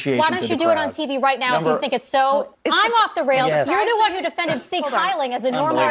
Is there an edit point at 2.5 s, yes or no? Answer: yes